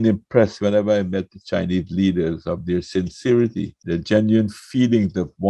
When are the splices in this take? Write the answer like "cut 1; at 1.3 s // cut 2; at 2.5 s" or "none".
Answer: cut 1; at 3.7 s